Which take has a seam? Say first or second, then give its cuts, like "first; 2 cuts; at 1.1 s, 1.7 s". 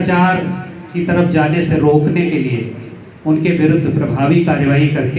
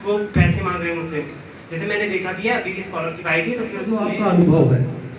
second; 1 cut; at 4.0 s